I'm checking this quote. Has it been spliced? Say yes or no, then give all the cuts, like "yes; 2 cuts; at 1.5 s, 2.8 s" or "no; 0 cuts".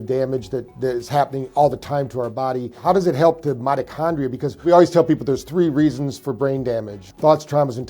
yes; 3 cuts; at 2.8 s, 4.6 s, 7.0 s